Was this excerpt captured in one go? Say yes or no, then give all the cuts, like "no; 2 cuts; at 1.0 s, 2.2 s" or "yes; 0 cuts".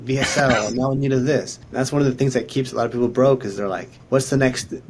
no; 2 cuts; at 1.6 s, 3.9 s